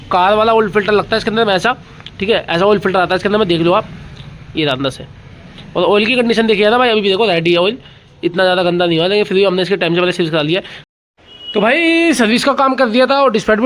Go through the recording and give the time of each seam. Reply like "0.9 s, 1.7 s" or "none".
10.7 s